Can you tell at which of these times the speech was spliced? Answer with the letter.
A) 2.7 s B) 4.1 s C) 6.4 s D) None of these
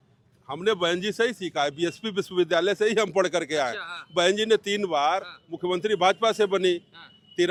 D